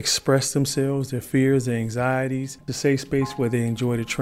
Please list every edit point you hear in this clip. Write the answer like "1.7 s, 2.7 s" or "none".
2.7 s